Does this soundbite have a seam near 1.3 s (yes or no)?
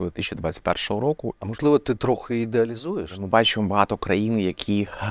yes